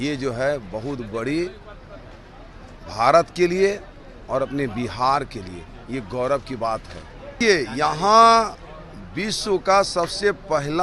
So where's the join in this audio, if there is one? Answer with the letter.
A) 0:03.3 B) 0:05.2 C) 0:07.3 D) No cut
C